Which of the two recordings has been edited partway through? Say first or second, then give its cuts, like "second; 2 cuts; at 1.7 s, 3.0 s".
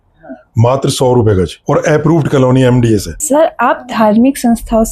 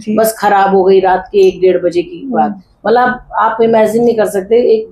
first; 2 cuts; at 1.6 s, 3.1 s